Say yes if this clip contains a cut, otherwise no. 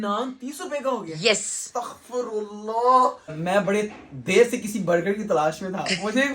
yes